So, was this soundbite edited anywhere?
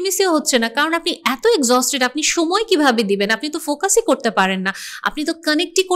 no; 0 cuts

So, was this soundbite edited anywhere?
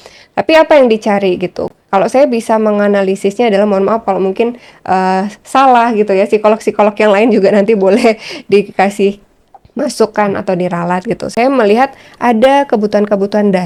no; 0 cuts

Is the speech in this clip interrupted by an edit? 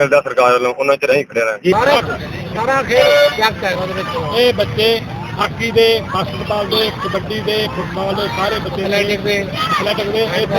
yes; 1 cut; at 1.7 s

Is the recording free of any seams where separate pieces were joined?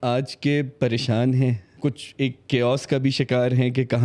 no; 1 cut; at 1.7 s

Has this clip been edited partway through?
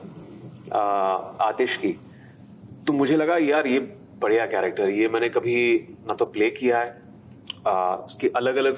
no; 0 cuts

